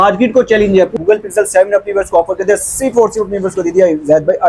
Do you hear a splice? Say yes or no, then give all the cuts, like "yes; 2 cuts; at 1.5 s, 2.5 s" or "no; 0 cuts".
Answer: yes; 1 cut; at 0.9 s